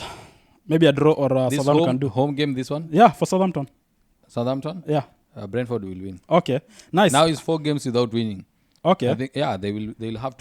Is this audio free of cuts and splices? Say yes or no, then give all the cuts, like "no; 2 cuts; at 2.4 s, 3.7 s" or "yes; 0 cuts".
yes; 0 cuts